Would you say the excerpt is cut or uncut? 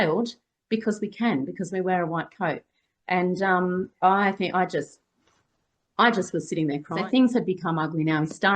cut